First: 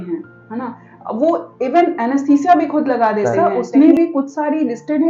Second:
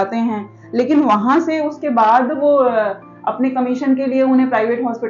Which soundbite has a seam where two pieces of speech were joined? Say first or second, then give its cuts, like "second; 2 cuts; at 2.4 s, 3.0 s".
first; 1 cut; at 3.3 s